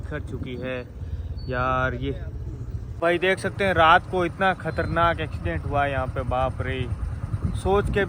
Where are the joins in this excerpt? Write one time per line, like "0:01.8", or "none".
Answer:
0:03.0